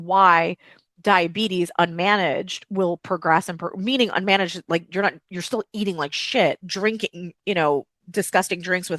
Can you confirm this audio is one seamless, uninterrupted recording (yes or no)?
no